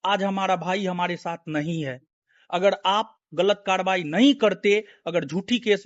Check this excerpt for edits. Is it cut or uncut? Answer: uncut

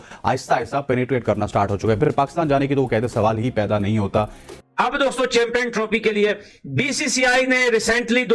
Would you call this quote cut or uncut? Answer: cut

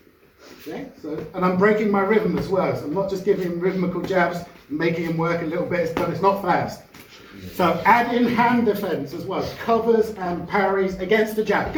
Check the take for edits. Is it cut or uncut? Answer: uncut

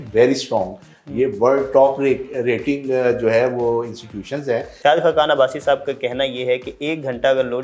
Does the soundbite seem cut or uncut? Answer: cut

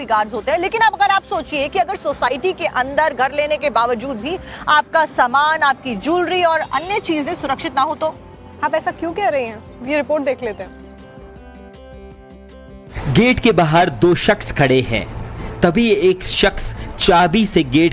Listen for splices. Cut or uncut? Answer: cut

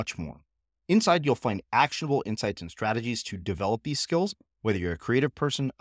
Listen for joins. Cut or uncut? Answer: uncut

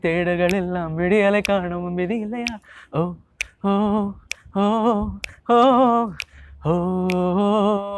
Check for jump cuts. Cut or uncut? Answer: uncut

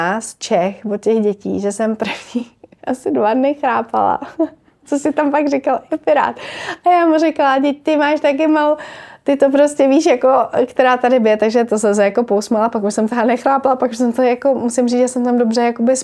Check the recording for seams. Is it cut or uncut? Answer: uncut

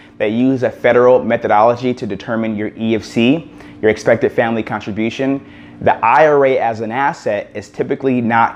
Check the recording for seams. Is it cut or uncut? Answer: uncut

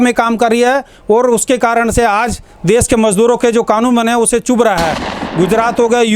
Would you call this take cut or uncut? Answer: cut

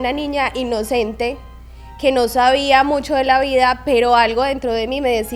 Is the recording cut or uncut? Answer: uncut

